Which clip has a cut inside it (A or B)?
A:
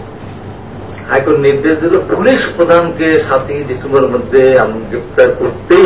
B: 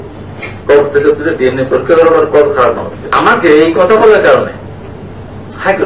B